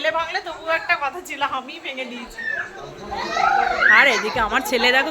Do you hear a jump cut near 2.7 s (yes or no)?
yes